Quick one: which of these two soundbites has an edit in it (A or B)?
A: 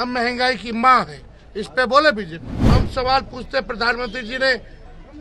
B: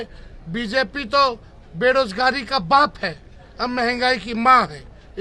A